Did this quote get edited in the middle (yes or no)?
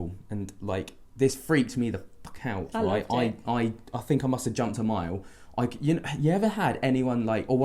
no